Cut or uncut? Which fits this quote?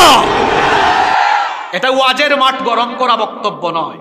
uncut